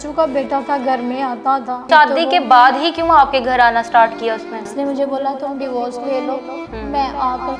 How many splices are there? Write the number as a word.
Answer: two